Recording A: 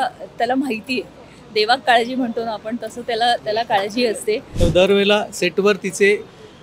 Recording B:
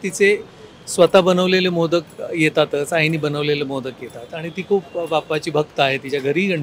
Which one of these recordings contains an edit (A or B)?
A